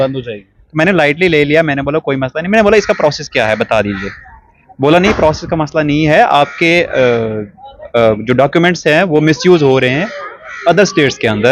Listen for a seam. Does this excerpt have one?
no; 0 cuts

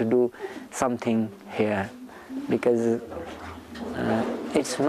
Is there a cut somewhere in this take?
no; 0 cuts

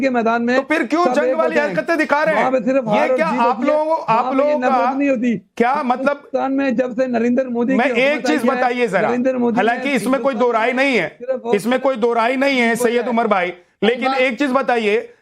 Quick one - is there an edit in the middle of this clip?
no; 0 cuts

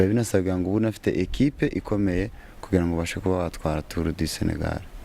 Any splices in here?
no; 0 cuts

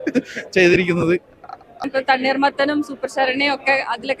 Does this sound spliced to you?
yes; 1 cut; at 1.8 s

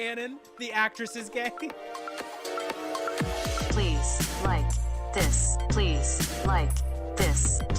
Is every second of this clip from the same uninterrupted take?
no; 1 cut; at 1.8 s

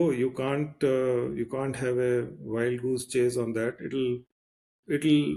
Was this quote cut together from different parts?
no; 0 cuts

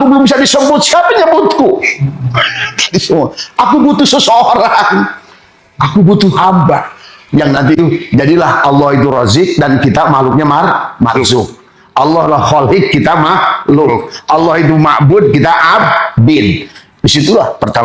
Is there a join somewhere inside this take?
no; 0 cuts

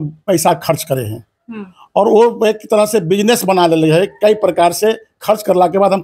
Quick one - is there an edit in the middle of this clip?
no; 0 cuts

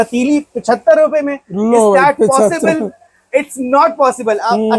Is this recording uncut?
yes; 0 cuts

